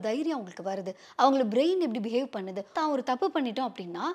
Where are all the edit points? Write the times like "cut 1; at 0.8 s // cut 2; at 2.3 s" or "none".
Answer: cut 1; at 2.8 s